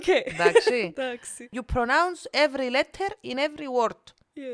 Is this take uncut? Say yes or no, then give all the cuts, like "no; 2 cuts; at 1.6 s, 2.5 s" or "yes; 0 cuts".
no; 1 cut; at 1.6 s